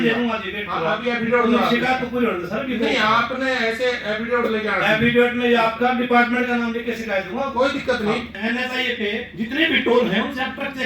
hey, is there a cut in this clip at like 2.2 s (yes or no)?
no